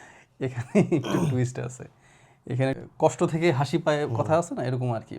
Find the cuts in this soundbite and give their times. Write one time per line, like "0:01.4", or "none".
0:02.8